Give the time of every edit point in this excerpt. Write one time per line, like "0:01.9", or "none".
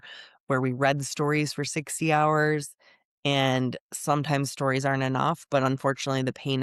none